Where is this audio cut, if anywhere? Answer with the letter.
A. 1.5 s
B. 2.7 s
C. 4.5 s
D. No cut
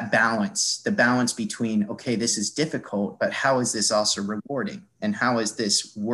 D